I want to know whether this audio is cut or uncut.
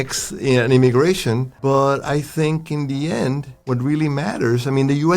cut